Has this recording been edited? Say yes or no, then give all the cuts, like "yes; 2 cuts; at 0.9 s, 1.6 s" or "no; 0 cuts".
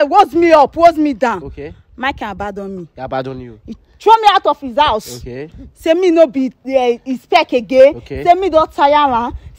no; 0 cuts